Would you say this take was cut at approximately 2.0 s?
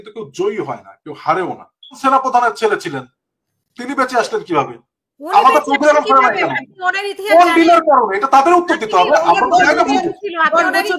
yes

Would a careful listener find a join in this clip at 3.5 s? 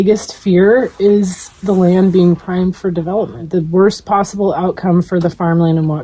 yes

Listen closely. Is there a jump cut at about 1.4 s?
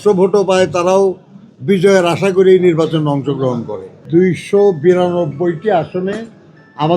no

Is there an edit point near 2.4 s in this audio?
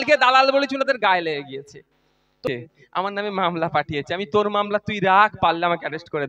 yes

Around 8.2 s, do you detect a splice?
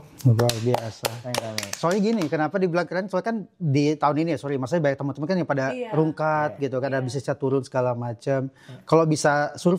no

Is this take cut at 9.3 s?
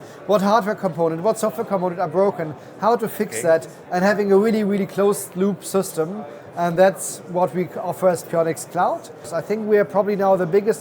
yes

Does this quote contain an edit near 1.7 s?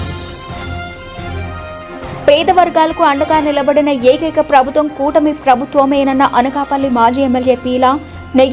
yes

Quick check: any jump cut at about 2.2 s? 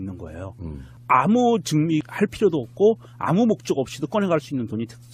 no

